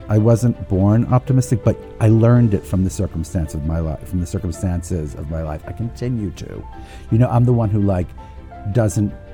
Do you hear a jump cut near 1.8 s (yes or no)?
yes